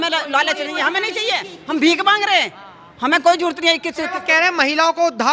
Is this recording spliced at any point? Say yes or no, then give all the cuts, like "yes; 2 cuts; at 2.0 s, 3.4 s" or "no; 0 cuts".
no; 0 cuts